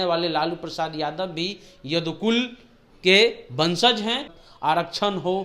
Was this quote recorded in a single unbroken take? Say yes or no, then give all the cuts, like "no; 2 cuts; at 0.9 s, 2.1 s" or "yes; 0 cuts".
no; 1 cut; at 4.3 s